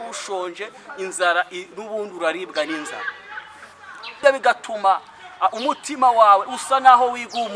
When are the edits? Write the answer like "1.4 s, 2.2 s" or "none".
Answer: 4.1 s